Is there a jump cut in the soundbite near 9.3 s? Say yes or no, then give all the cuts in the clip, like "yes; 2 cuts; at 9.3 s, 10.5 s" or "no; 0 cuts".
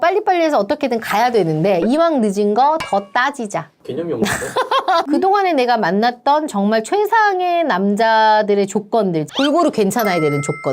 yes; 2 cuts; at 5.1 s, 9.3 s